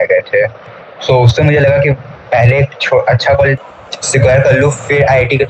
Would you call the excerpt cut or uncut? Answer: cut